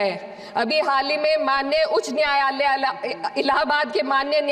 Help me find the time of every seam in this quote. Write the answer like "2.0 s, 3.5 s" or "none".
none